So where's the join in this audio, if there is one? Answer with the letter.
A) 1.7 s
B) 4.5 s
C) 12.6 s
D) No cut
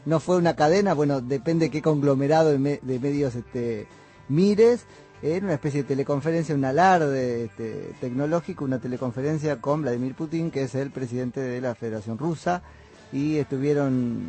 D